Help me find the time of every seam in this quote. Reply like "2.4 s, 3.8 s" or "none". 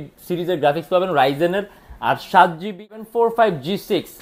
3.0 s